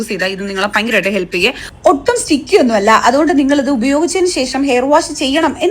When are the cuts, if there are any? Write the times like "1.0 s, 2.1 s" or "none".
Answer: 1.3 s